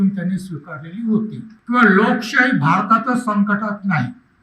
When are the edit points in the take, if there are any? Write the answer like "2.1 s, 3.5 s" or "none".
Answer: 1.5 s